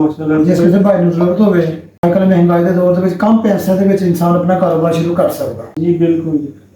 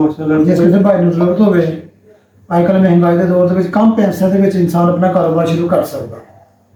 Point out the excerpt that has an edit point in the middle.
first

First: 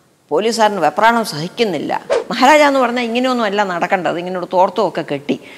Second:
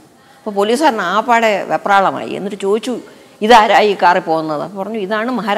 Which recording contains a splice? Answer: first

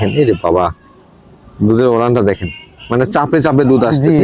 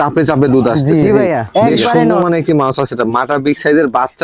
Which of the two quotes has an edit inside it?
second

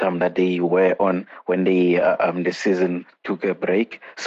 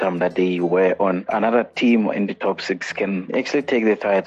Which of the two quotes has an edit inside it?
second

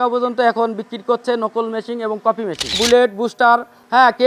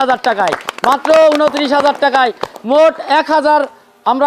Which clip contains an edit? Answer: first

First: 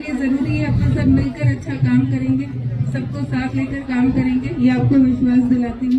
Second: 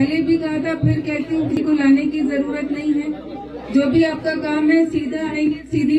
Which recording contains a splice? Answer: second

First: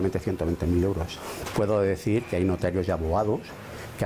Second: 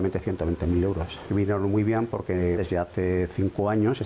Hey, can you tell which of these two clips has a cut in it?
first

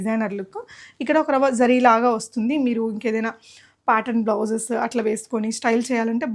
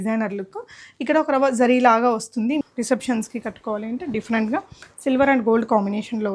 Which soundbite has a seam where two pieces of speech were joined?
second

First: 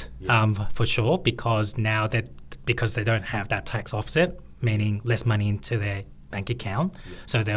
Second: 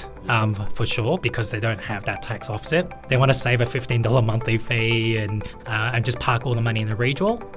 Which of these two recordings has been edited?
second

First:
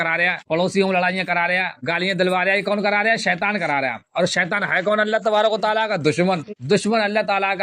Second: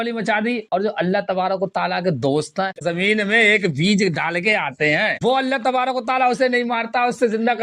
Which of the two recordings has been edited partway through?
second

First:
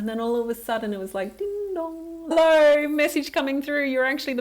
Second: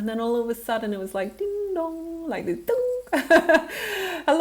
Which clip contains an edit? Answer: first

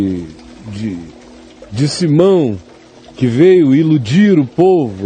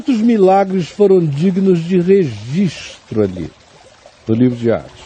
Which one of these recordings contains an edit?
first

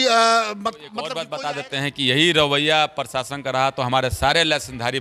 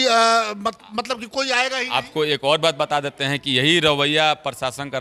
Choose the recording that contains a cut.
first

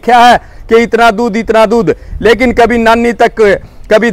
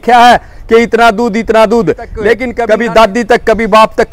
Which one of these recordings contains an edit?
second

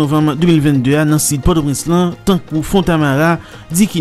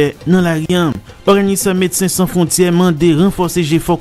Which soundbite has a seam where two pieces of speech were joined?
second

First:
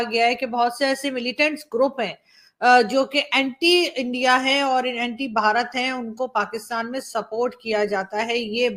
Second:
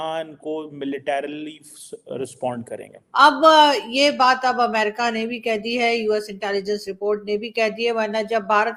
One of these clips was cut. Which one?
second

